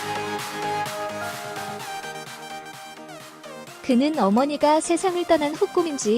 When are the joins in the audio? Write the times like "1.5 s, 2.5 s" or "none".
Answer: none

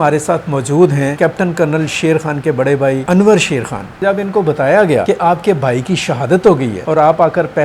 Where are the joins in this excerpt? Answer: 1.1 s, 3.0 s, 4.0 s, 5.0 s, 6.8 s

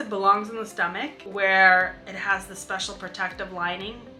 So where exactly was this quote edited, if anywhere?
1.2 s

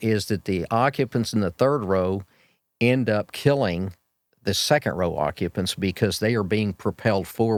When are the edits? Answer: none

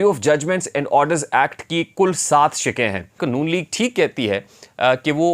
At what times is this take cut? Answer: 3.2 s

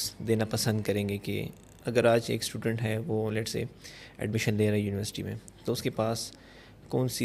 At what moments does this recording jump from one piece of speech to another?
none

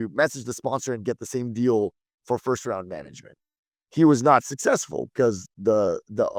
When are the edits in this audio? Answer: none

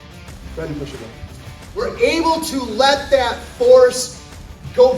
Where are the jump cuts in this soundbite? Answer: 1.8 s

